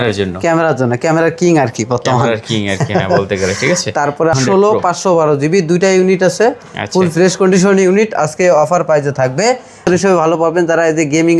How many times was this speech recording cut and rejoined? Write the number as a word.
two